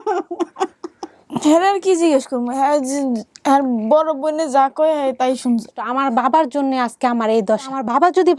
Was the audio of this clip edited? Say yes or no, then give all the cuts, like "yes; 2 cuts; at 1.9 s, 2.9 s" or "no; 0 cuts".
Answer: yes; 1 cut; at 5.8 s